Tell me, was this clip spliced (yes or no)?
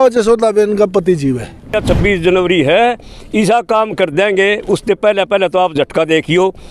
yes